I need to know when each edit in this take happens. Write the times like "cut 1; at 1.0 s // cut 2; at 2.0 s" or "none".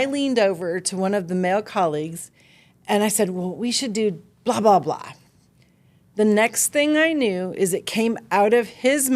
none